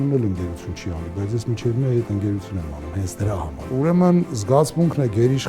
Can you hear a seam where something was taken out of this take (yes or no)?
yes